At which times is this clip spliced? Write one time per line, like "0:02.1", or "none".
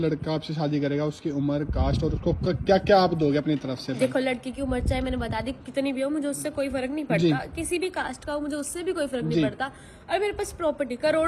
none